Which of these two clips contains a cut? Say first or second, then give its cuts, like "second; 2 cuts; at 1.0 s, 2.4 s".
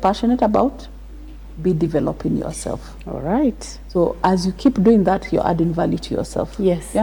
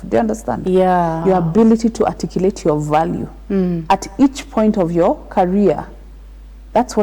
second; 1 cut; at 1.2 s